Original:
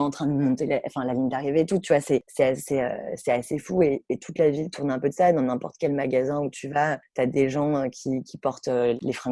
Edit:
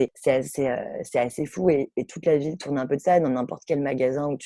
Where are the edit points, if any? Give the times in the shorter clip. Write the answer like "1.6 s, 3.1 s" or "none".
none